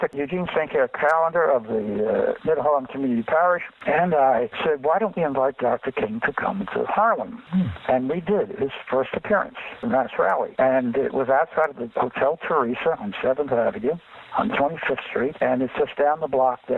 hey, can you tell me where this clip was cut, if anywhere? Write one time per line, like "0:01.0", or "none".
none